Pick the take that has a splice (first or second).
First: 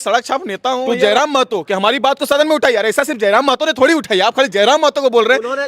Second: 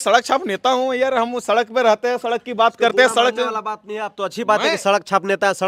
first